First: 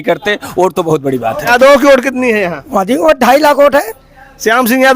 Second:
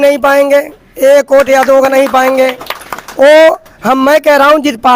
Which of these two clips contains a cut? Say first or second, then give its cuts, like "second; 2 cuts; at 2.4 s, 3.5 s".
first; 1 cut; at 1.5 s